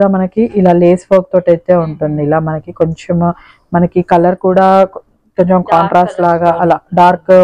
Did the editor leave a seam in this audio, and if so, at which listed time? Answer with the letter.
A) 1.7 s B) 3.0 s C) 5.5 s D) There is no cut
D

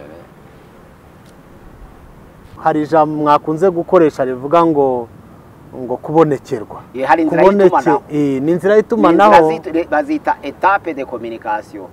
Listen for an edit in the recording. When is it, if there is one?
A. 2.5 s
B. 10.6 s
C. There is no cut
A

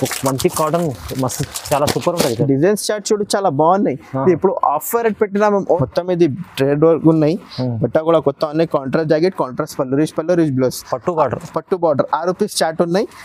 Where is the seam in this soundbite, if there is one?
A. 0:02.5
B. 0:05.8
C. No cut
B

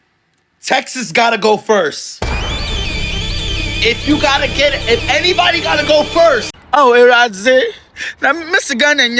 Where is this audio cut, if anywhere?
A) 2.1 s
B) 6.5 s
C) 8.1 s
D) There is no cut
B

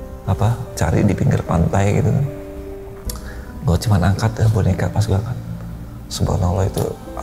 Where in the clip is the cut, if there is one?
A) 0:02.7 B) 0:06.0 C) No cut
C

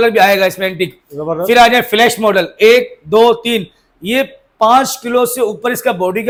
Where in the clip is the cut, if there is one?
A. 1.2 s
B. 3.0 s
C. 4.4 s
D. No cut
D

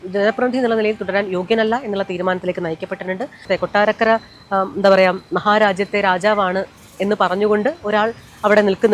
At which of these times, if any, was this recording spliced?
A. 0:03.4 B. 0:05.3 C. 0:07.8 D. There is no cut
A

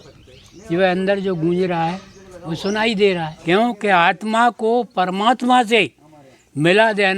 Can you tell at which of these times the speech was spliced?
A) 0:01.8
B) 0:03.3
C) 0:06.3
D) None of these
B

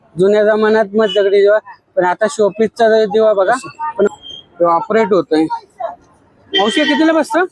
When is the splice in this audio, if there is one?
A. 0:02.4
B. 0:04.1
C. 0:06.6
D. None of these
B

